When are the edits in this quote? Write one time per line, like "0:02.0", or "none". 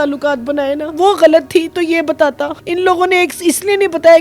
0:00.9
0:02.5